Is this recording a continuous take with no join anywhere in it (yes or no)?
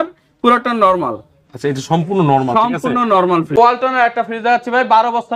no